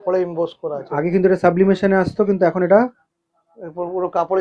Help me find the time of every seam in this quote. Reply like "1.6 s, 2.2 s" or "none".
none